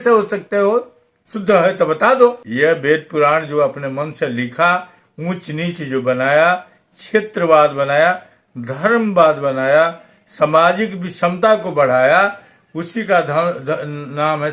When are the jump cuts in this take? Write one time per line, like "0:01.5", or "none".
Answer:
0:02.4